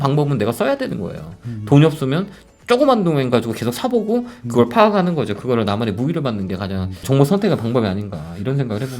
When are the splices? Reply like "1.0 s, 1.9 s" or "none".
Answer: 7.0 s